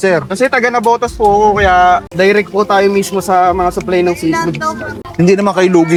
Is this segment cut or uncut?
uncut